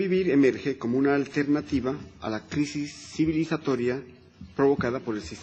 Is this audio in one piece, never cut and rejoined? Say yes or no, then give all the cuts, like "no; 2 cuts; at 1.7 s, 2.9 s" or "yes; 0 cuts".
no; 1 cut; at 3.6 s